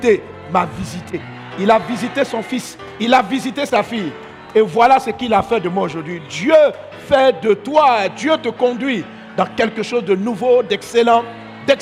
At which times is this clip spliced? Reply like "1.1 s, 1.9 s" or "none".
none

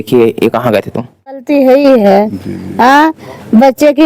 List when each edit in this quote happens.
1.4 s

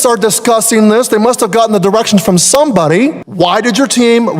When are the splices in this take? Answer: 3.2 s

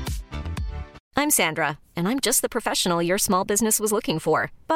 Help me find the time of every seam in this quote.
1.0 s

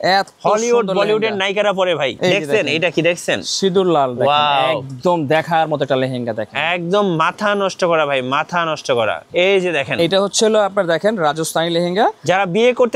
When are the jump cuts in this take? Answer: 2.1 s, 9.2 s

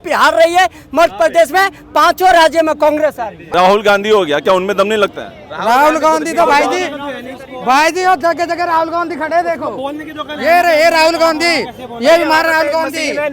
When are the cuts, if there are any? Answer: 3.5 s

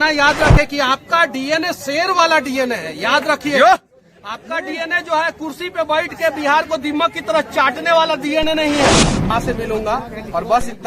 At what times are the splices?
9.3 s

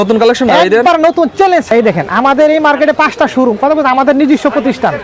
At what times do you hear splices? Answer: 1.7 s

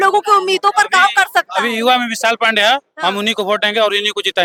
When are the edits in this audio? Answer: none

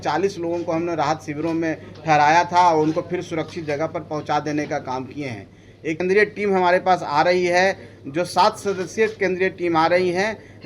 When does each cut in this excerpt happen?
6.0 s

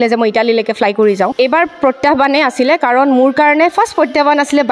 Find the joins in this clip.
1.2 s

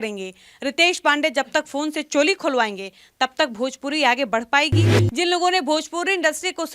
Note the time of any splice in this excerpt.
4.9 s

